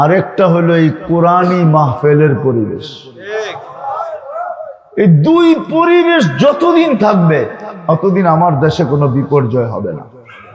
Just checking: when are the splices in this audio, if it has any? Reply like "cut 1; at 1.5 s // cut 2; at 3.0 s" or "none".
none